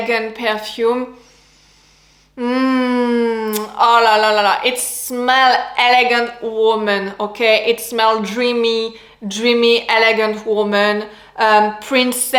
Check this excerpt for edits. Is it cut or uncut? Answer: uncut